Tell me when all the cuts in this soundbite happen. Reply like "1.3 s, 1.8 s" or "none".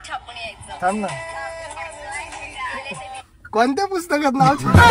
none

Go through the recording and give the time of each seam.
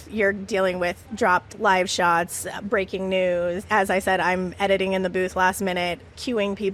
none

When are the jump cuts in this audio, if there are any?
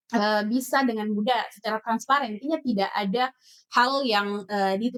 none

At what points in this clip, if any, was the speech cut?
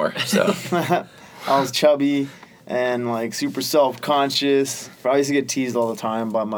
5.0 s

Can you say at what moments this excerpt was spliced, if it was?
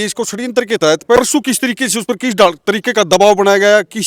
1.2 s

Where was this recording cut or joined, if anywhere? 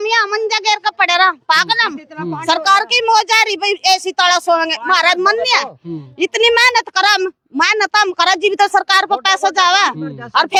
none

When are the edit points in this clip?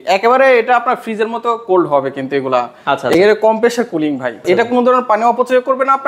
4.4 s

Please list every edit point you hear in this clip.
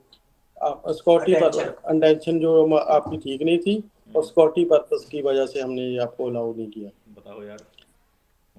none

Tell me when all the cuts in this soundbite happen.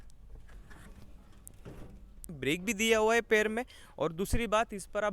2.3 s

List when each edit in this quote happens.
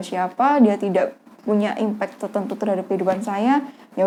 none

